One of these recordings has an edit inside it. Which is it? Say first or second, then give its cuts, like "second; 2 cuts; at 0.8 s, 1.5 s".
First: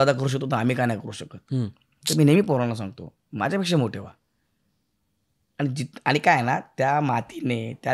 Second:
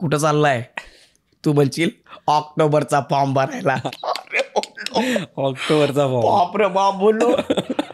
second; 1 cut; at 3.9 s